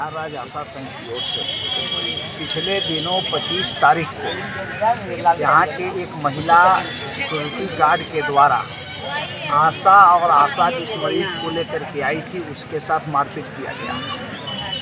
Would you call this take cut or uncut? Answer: uncut